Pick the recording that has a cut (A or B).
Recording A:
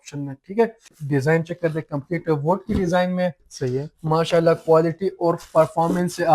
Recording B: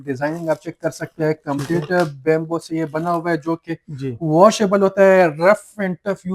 A